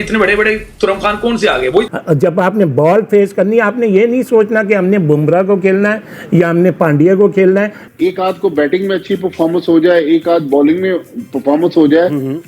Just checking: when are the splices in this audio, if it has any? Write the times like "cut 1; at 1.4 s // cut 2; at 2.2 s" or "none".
cut 1; at 1.9 s // cut 2; at 7.8 s